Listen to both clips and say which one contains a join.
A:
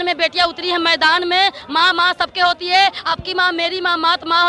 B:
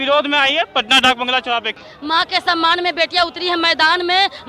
B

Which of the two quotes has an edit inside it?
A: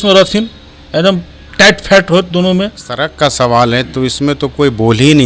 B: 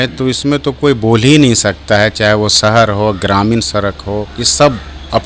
A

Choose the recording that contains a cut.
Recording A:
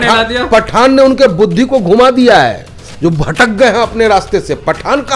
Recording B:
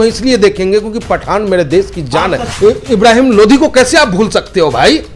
B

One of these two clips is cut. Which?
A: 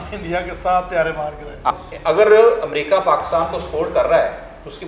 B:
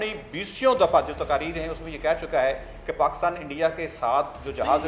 A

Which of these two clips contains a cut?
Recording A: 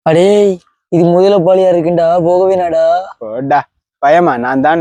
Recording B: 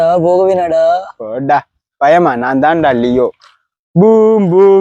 B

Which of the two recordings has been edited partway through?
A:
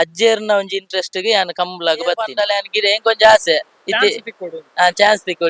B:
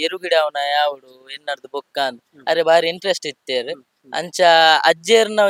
A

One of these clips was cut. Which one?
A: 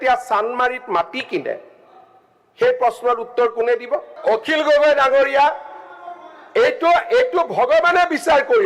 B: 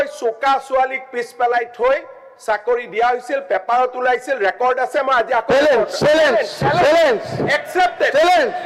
A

